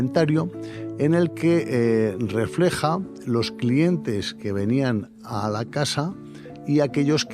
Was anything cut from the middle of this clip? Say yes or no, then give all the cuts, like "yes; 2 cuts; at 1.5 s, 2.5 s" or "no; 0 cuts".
no; 0 cuts